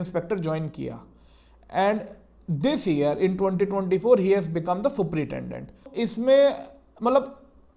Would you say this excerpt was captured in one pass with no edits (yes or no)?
no